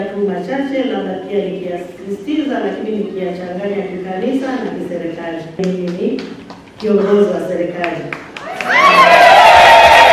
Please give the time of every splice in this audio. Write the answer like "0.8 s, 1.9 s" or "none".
5.6 s